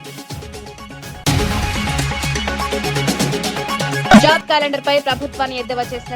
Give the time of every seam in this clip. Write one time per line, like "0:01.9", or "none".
0:01.2
0:04.1